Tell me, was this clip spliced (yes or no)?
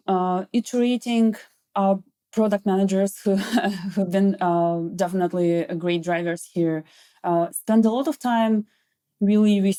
no